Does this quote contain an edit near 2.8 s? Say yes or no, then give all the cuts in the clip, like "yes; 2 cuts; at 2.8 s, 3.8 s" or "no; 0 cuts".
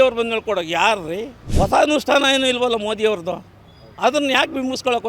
no; 1 cut; at 1.4 s